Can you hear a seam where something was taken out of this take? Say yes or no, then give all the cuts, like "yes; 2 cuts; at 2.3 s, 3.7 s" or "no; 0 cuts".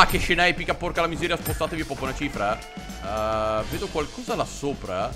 no; 0 cuts